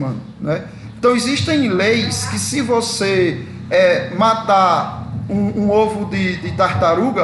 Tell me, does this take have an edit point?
no; 0 cuts

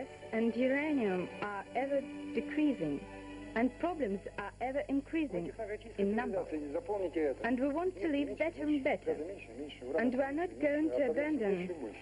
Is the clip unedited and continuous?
no; 1 cut; at 6.4 s

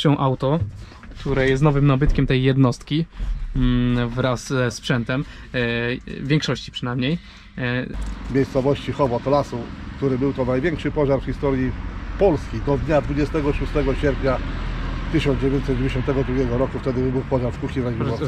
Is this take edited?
yes; 1 cut; at 8.0 s

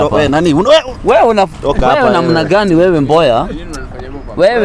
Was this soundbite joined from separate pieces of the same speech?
no; 0 cuts

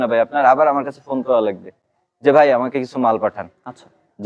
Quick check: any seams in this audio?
no; 0 cuts

